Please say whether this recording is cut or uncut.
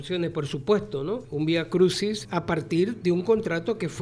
cut